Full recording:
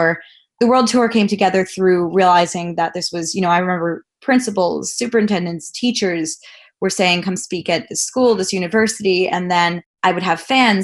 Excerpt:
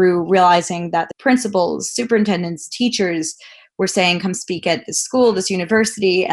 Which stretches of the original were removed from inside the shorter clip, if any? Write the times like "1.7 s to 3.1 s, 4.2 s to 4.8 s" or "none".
3.0 s to 4.2 s